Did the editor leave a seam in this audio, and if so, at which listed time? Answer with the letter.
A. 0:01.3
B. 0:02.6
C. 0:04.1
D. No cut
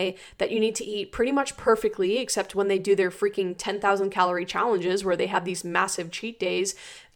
D